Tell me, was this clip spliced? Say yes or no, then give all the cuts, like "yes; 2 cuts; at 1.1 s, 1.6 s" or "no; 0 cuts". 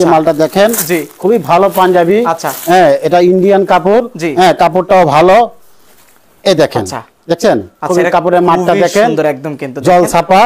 no; 0 cuts